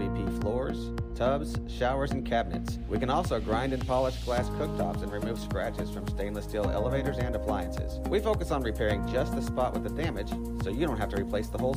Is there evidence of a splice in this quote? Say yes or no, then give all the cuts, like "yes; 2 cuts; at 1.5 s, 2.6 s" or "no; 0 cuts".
no; 0 cuts